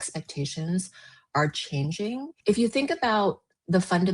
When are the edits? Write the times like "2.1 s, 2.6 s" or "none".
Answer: 2.3 s

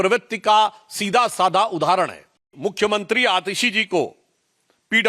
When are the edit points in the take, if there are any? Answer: 2.4 s

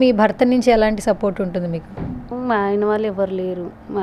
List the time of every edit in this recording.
none

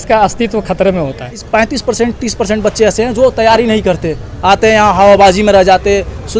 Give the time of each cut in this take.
1.4 s

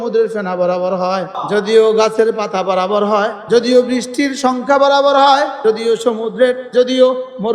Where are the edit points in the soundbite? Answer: 1.4 s, 3.4 s, 5.6 s, 6.7 s

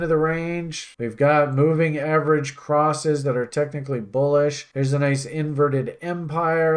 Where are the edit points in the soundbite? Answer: 0.9 s

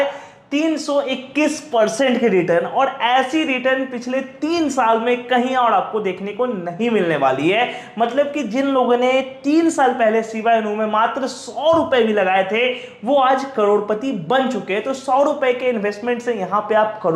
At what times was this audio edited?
none

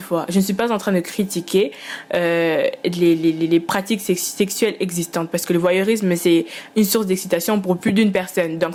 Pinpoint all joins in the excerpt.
none

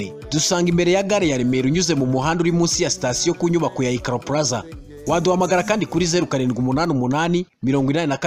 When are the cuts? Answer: none

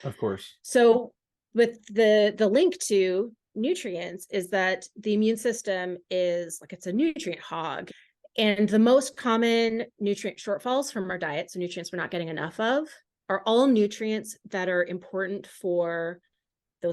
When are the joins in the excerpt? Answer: 7.8 s

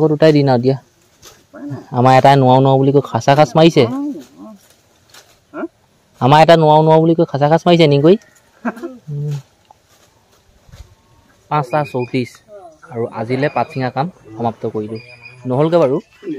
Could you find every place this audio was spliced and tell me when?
none

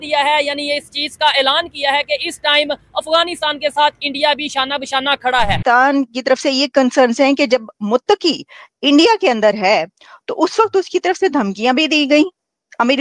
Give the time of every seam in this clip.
5.6 s

